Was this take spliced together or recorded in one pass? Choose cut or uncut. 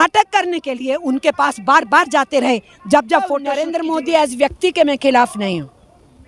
cut